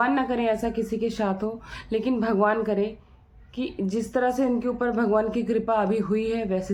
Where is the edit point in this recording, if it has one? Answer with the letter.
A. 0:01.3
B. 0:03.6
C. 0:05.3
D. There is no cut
D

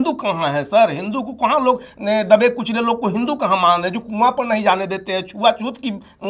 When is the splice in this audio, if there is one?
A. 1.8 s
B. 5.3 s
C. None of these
C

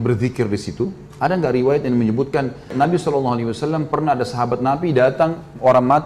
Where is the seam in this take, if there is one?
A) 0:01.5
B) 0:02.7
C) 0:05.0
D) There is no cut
B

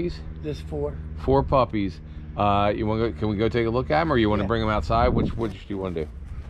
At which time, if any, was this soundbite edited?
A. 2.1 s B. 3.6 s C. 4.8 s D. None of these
D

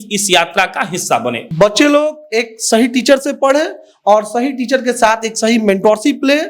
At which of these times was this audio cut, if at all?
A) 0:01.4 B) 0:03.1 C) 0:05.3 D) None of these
A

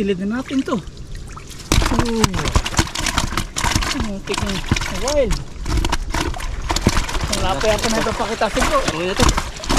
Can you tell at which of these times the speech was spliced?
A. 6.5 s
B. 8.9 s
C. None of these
B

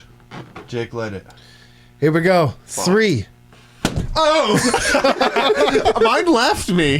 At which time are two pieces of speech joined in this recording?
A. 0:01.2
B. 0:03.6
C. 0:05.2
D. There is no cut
D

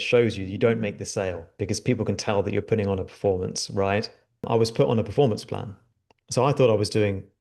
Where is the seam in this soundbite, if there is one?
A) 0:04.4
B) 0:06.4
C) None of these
A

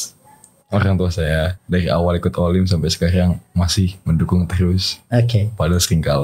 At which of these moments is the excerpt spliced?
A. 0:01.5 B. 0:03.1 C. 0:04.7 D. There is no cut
A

